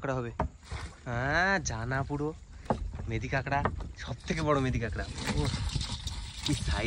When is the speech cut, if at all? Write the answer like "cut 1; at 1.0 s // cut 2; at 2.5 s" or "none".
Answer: none